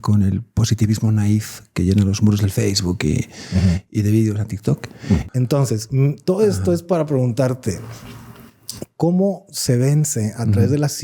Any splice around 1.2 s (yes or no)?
no